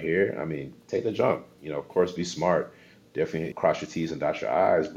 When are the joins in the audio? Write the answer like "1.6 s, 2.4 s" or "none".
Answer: 3.5 s